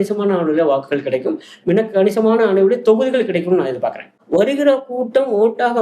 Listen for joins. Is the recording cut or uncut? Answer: cut